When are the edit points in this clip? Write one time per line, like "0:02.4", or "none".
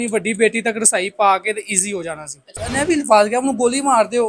0:02.7